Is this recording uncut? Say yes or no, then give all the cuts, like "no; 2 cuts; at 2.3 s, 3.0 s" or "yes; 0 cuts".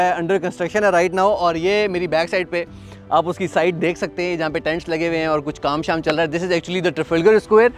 yes; 0 cuts